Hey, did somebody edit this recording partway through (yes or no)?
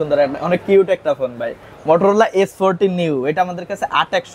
no